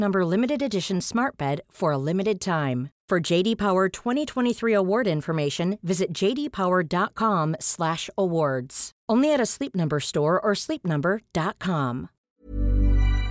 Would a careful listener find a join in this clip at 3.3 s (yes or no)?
no